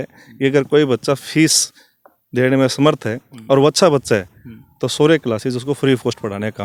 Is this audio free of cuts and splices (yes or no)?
yes